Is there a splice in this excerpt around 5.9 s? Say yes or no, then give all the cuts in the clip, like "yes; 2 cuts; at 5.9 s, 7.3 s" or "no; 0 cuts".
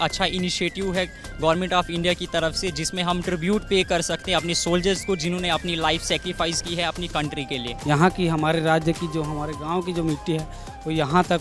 no; 1 cut; at 7.8 s